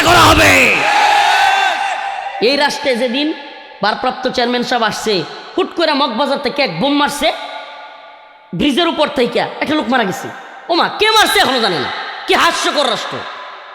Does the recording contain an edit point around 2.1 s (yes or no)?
yes